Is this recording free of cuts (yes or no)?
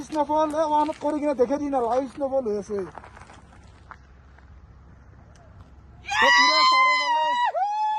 yes